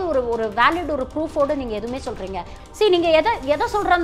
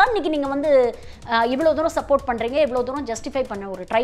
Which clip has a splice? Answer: first; 1 cut; at 2.5 s

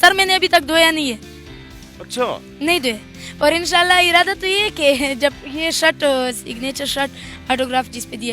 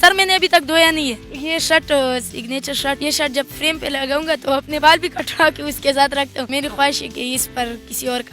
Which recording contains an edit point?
second; 4 cuts; at 1.3 s, 3.0 s, 4.7 s, 6.5 s

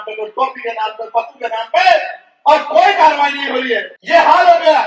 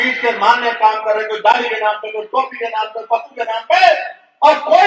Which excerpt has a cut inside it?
first; 1 cut; at 3.9 s

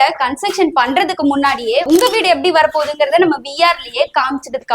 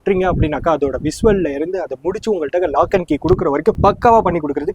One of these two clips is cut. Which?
second; 1 cut; at 3.8 s

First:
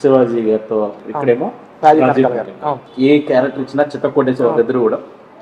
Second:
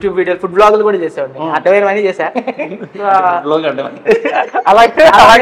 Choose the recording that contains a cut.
first; 2 cuts; at 1.0 s, 2.8 s

